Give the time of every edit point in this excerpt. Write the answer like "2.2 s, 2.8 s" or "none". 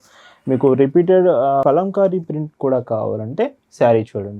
1.6 s

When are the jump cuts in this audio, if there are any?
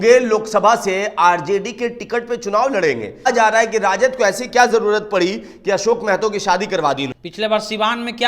3.3 s, 7.2 s

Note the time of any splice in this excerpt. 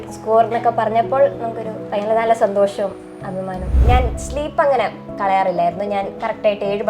3.8 s

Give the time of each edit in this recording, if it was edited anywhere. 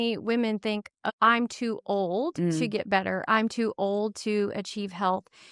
1.1 s

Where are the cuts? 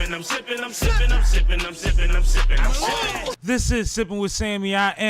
3.4 s

